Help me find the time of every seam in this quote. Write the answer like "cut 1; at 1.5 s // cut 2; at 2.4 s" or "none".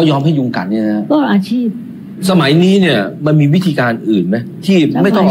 cut 1; at 2.1 s